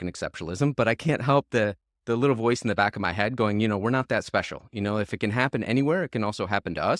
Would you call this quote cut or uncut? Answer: uncut